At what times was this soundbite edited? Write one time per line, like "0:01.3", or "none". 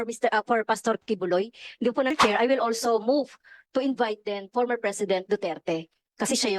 0:02.1